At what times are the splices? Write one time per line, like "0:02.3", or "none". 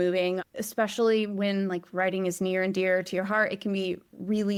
none